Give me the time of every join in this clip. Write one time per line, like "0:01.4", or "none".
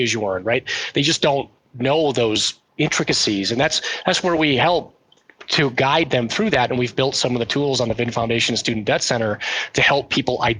0:01.6
0:02.6